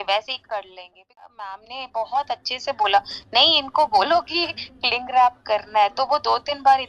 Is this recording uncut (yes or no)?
no